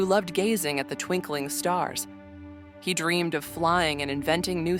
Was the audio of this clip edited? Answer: no; 0 cuts

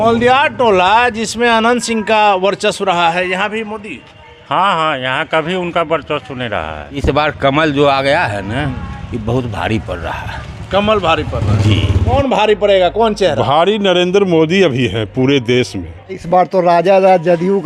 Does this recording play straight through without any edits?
no; 3 cuts; at 7.0 s, 12.1 s, 16.2 s

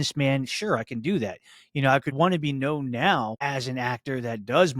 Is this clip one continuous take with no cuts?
no; 2 cuts; at 2.2 s, 3.3 s

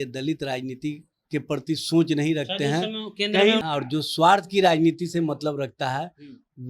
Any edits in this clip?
yes; 1 cut; at 3.6 s

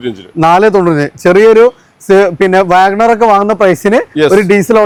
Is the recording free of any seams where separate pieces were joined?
yes; 0 cuts

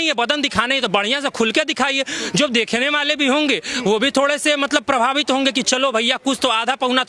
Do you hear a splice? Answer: no; 0 cuts

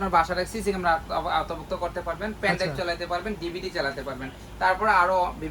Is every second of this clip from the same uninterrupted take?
yes; 0 cuts

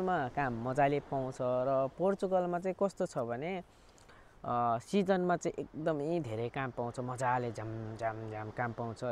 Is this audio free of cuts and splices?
yes; 0 cuts

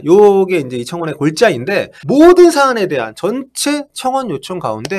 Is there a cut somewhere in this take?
yes; 1 cut; at 1.9 s

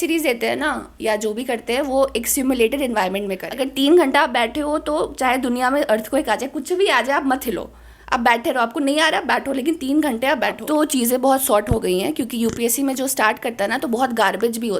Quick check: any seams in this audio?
yes; 2 cuts; at 3.4 s, 10.6 s

